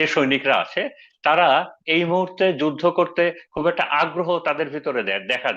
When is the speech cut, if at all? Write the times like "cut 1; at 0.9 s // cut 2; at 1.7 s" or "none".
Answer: none

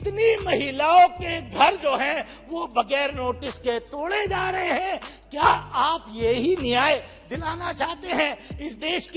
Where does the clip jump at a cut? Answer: none

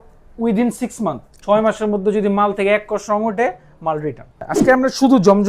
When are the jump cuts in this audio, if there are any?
cut 1; at 4.4 s

